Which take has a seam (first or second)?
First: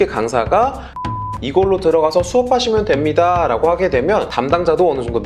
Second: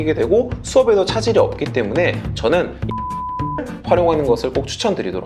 first